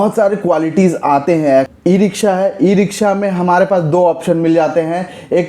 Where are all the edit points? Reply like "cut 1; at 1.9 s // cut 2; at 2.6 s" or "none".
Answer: cut 1; at 1.7 s